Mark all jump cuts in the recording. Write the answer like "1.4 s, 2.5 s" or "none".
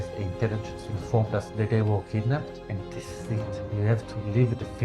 2.6 s